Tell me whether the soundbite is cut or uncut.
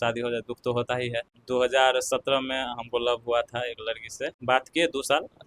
cut